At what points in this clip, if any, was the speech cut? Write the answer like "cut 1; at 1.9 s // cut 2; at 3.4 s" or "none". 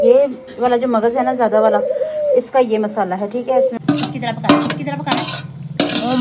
cut 1; at 3.8 s